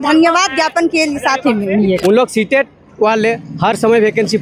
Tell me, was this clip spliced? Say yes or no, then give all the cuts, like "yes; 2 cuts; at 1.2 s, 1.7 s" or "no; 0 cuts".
yes; 1 cut; at 2.0 s